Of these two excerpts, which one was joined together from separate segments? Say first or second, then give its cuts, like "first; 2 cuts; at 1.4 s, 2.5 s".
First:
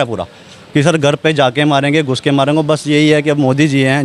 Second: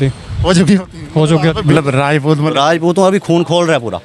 second; 1 cut; at 1.7 s